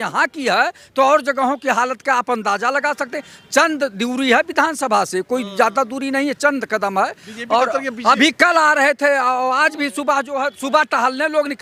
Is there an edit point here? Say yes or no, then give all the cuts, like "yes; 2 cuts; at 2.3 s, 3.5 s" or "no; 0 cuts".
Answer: no; 0 cuts